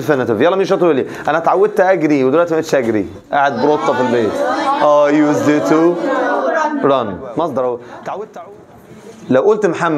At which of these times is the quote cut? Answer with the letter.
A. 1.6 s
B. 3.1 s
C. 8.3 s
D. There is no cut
C